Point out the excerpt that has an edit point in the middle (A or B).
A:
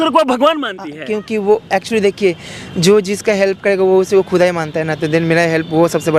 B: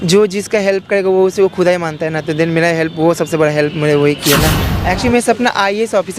B